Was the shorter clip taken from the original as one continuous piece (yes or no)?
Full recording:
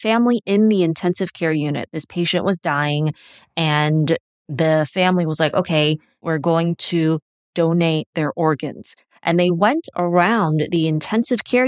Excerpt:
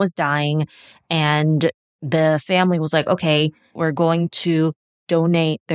yes